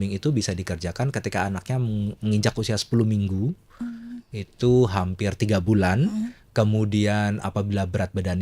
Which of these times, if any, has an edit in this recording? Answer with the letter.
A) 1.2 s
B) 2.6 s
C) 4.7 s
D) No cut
D